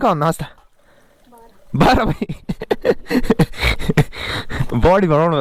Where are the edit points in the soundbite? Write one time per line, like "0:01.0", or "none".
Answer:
none